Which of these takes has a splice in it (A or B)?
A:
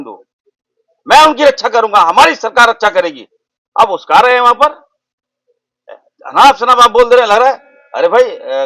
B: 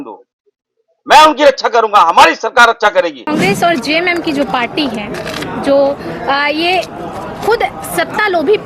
B